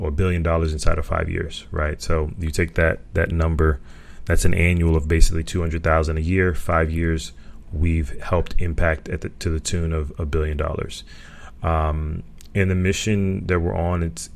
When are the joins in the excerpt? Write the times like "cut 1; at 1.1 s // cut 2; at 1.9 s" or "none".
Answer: none